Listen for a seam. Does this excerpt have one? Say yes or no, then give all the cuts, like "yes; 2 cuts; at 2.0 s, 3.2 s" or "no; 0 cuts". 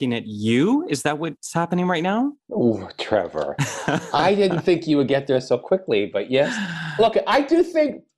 no; 0 cuts